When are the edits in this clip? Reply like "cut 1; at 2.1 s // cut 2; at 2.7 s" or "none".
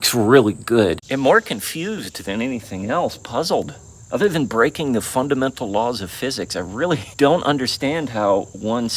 cut 1; at 1.0 s

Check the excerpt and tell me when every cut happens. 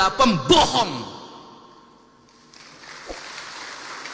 none

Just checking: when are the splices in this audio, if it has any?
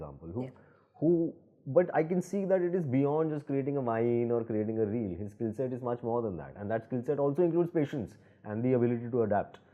none

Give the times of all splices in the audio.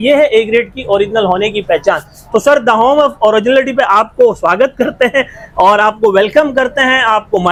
none

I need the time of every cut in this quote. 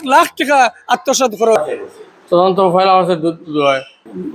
cut 1; at 1.6 s

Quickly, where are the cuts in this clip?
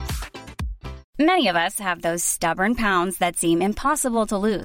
cut 1; at 1.0 s

